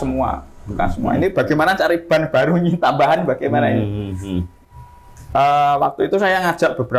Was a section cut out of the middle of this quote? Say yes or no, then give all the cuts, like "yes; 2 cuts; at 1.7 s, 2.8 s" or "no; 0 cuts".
no; 0 cuts